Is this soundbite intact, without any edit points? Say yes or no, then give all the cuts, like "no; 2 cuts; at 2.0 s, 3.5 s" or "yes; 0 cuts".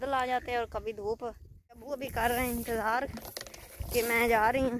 no; 1 cut; at 1.9 s